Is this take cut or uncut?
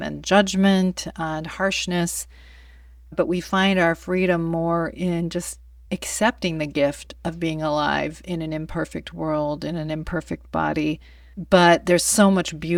uncut